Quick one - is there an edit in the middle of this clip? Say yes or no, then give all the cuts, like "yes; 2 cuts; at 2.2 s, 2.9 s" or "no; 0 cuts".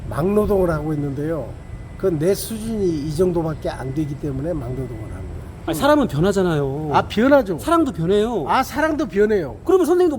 yes; 1 cut; at 5.6 s